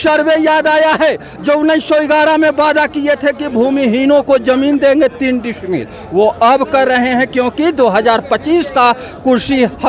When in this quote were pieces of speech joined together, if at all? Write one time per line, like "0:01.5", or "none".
none